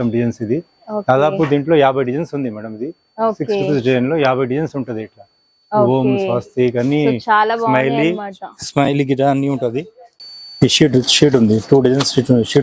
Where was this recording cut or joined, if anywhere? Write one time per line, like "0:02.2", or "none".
0:10.2